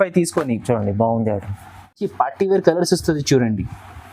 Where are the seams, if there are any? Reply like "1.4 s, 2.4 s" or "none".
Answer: 2.1 s